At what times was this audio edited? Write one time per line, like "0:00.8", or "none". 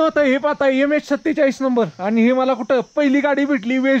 none